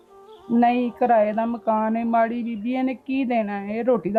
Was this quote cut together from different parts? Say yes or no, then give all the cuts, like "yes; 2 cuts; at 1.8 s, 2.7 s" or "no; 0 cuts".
no; 0 cuts